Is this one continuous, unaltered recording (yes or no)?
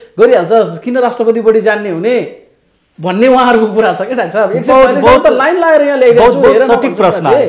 yes